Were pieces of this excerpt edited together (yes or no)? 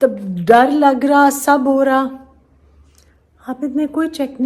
no